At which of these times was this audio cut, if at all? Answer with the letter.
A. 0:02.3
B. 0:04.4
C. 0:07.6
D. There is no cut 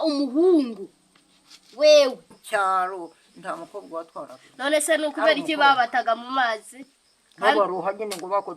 A